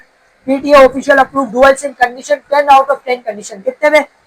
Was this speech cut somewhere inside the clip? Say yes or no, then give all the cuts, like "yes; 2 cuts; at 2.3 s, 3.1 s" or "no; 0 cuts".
no; 0 cuts